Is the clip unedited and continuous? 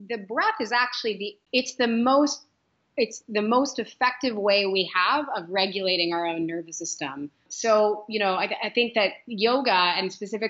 no; 2 cuts; at 1.4 s, 7.5 s

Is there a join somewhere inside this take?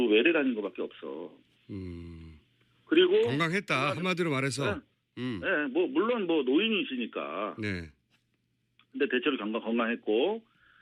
no; 0 cuts

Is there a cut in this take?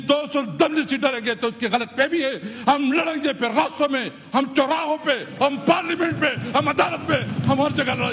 no; 0 cuts

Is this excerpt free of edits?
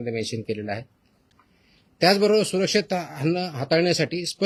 yes; 0 cuts

